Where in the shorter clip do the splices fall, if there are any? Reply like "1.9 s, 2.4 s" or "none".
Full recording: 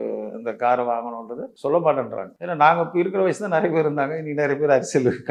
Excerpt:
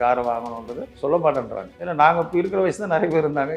none